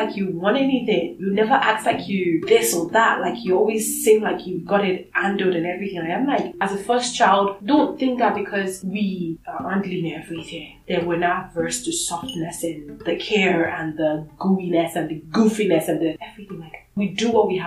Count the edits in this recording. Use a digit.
1